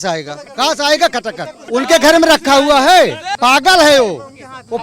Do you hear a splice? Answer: yes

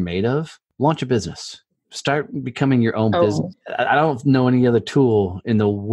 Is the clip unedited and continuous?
no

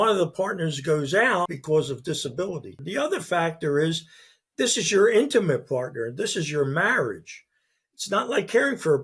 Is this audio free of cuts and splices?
no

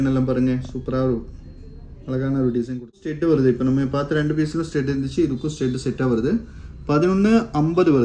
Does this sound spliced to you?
yes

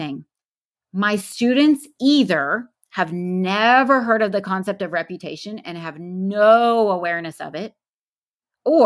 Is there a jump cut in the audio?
no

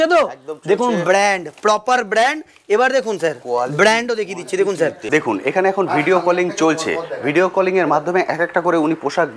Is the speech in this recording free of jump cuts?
no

